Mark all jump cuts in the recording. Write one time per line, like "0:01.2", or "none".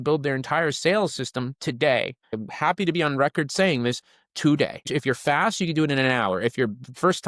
0:02.4
0:04.8

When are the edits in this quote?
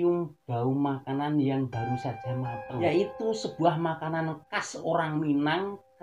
0:02.8

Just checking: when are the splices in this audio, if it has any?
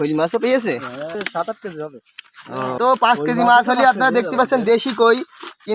0:01.2
0:02.8

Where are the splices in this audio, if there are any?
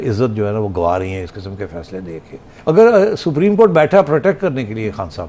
0:02.5

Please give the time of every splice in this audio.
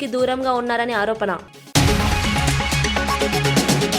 0:01.5

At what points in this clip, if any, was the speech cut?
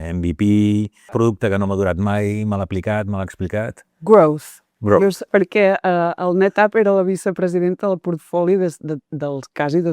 0:05.2

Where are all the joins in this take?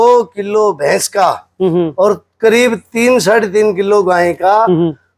none

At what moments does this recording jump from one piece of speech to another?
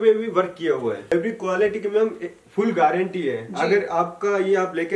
0:01.1

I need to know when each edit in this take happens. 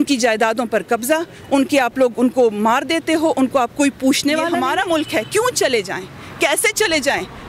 0:04.5

